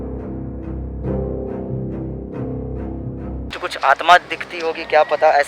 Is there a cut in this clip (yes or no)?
yes